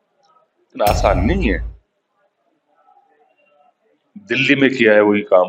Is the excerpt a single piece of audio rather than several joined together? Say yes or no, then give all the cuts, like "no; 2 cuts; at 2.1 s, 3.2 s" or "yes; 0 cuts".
yes; 0 cuts